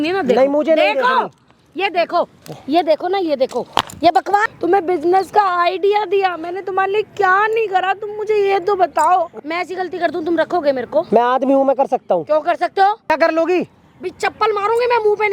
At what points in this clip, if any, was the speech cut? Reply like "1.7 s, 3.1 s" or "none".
2.5 s, 4.4 s, 9.3 s, 13.1 s